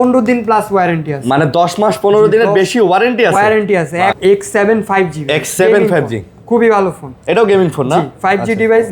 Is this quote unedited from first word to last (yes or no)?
no